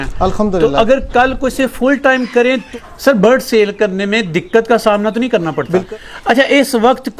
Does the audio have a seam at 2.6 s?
yes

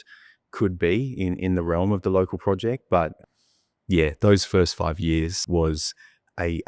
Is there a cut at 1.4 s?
no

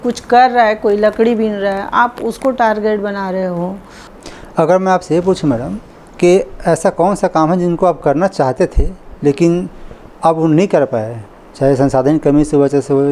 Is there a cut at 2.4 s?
no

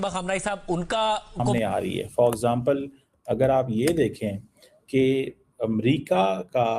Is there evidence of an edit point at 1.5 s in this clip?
yes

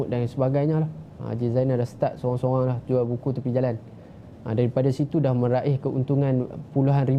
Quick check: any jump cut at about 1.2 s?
no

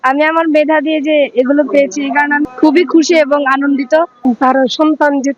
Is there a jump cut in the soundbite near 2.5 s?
no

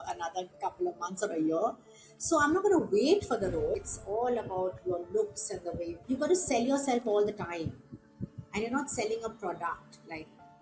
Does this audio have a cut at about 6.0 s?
yes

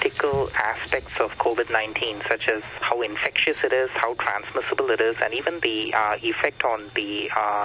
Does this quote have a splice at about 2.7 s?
yes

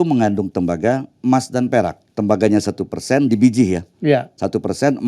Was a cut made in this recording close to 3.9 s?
no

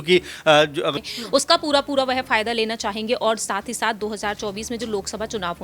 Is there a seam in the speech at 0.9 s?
yes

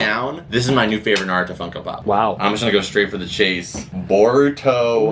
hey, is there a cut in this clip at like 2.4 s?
yes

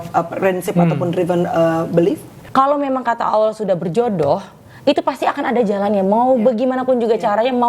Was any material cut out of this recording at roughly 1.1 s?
no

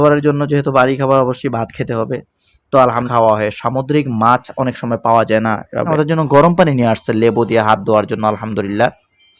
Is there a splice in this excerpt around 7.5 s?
no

